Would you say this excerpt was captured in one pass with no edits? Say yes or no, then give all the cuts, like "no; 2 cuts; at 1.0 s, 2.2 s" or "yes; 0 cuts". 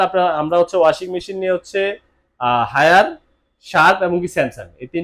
yes; 0 cuts